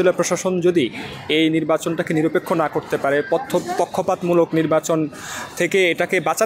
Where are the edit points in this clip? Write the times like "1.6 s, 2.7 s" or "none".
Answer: none